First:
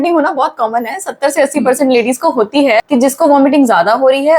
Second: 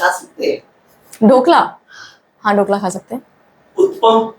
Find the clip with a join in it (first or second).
first